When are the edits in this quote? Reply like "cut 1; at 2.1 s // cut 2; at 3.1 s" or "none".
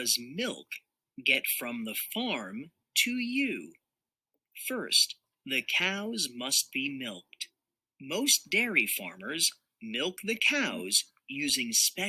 cut 1; at 5.3 s